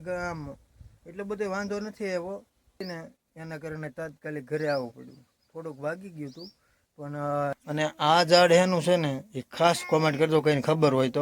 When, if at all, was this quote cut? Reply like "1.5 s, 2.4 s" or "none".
2.8 s, 7.5 s